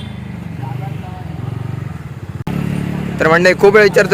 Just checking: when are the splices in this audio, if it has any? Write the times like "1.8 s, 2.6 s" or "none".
2.5 s